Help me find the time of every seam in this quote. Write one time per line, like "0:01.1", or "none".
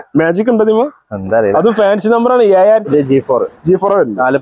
0:02.9